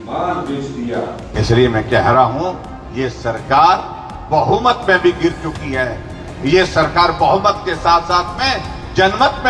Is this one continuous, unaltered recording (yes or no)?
no